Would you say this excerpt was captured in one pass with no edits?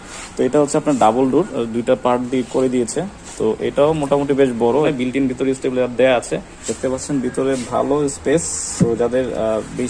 no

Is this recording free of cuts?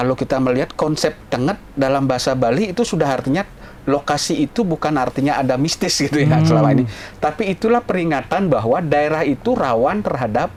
yes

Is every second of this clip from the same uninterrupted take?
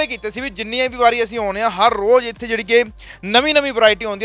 yes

